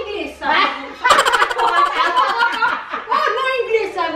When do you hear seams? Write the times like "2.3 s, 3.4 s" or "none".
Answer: none